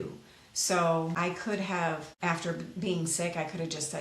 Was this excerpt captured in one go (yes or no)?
no